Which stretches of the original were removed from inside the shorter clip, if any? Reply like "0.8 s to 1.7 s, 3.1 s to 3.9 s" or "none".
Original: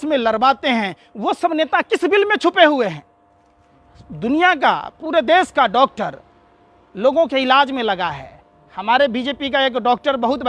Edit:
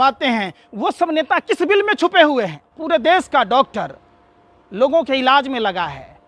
3.1 s to 4.9 s